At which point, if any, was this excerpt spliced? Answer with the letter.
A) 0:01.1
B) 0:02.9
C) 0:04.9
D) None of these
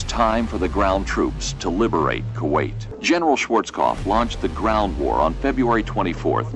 B